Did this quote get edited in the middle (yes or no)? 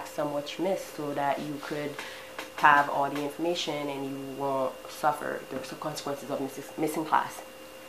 no